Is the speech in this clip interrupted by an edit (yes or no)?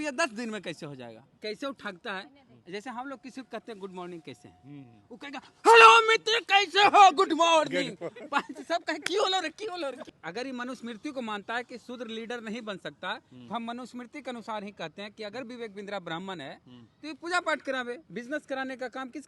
yes